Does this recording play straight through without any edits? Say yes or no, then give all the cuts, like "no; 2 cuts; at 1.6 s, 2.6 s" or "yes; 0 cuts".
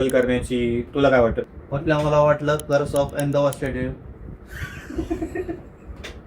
no; 1 cut; at 1.4 s